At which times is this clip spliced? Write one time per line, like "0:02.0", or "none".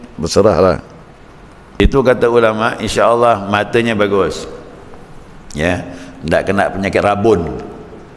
0:01.8